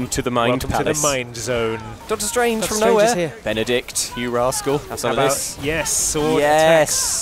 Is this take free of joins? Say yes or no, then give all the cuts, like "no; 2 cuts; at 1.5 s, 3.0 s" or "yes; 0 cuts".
no; 3 cuts; at 2.0 s, 3.4 s, 4.9 s